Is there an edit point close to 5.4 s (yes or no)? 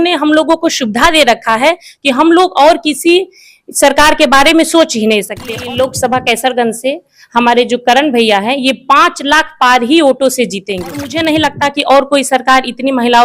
yes